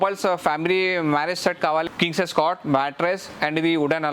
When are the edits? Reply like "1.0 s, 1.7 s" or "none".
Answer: 1.9 s